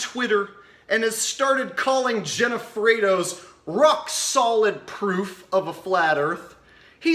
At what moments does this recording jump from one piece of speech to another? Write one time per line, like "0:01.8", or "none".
0:03.0